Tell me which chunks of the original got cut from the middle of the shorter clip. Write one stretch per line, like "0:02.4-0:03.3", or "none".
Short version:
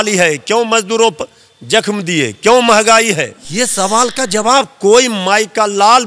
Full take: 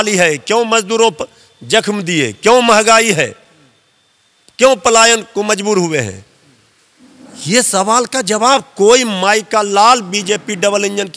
0:03.4-0:07.3